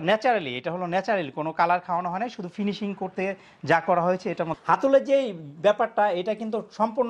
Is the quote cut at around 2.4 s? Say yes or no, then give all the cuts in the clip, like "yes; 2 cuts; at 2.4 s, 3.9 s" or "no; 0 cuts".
no; 1 cut; at 4.6 s